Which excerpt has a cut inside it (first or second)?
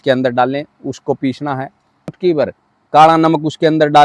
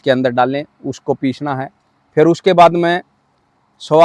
first